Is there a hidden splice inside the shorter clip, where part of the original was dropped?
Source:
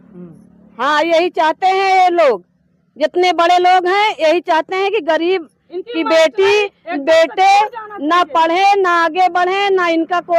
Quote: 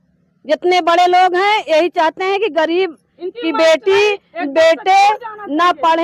no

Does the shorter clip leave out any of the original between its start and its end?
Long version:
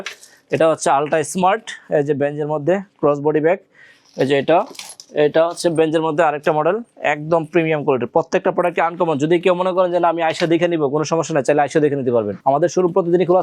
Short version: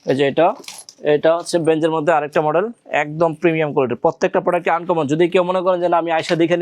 no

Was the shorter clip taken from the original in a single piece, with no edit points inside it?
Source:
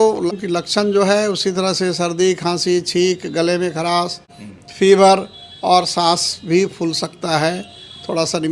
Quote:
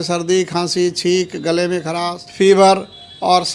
no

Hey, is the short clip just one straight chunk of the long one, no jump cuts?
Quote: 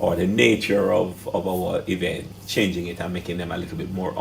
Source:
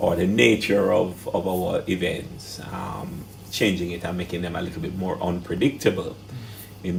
no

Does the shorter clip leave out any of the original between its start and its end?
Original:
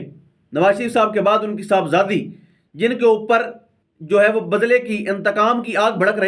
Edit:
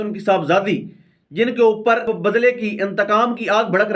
yes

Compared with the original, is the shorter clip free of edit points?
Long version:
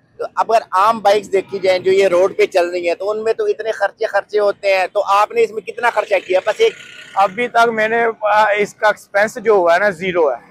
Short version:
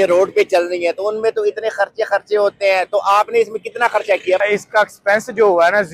no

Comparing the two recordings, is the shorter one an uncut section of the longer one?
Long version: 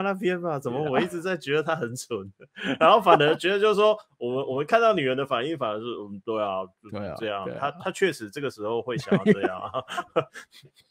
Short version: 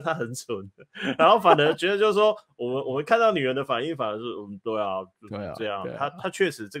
yes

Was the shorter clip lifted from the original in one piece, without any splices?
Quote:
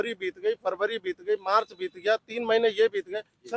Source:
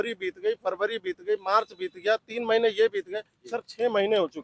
yes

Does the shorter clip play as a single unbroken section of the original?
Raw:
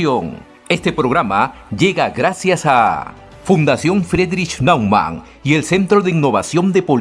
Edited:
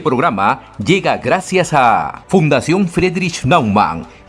no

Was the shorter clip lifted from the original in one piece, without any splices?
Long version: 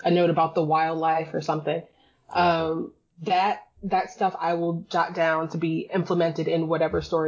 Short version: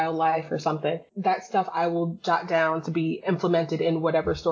no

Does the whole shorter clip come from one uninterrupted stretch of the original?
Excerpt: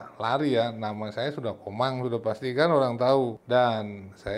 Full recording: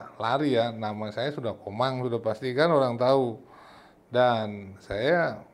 no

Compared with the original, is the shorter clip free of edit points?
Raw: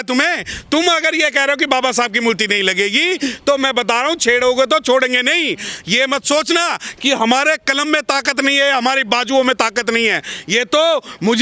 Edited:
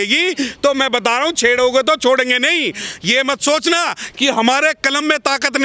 yes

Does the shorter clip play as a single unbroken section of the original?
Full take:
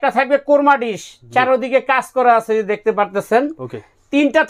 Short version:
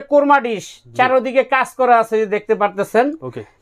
yes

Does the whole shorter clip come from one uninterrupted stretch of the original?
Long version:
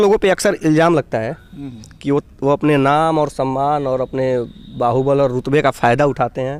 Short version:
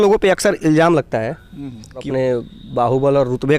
no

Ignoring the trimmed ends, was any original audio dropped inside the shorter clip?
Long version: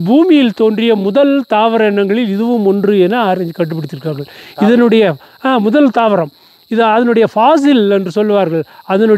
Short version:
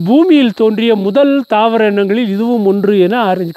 no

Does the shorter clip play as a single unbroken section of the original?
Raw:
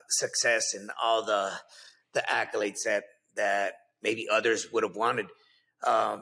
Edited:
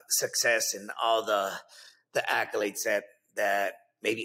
yes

